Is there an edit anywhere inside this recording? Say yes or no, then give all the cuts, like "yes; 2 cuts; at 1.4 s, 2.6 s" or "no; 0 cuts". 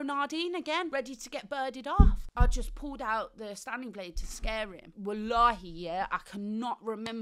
yes; 3 cuts; at 0.9 s, 2.2 s, 4.8 s